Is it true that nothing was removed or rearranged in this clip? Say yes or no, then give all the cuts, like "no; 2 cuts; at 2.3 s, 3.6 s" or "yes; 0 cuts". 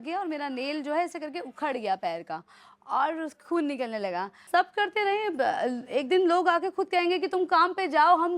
no; 1 cut; at 4.5 s